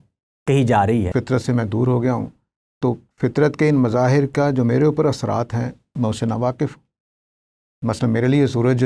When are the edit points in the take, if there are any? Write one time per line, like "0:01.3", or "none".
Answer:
0:01.1